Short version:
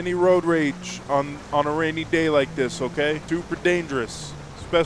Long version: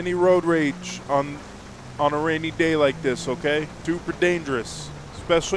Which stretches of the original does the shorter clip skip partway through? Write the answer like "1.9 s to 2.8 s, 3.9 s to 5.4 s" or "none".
1.4 s to 1.8 s, 3.7 s to 3.8 s